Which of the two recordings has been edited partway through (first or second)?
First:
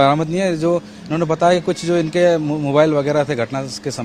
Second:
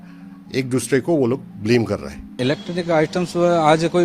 second